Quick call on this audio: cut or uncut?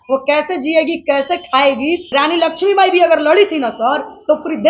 cut